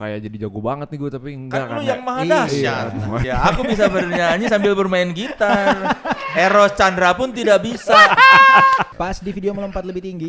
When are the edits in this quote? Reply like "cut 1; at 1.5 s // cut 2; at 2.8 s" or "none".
cut 1; at 3.2 s // cut 2; at 8.9 s